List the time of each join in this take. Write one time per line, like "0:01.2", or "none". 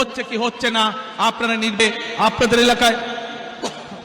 0:01.8